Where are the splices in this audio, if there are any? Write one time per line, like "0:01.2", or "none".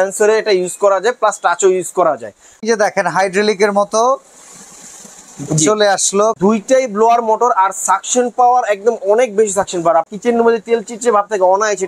0:02.6
0:06.4
0:10.1